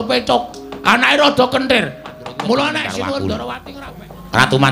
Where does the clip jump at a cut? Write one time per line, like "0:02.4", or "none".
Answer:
0:03.6